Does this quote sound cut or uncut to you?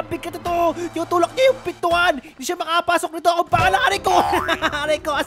uncut